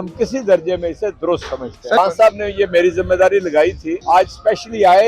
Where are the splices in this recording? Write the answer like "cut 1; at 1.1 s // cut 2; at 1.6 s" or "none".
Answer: cut 1; at 2.0 s // cut 2; at 3.9 s